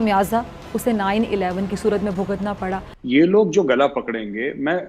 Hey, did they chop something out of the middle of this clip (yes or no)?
yes